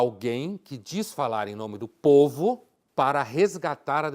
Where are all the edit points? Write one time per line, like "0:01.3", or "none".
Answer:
0:02.7